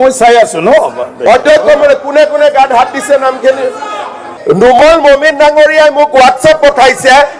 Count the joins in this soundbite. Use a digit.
1